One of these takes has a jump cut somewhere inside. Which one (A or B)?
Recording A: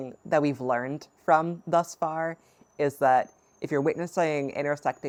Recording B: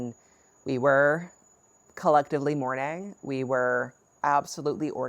B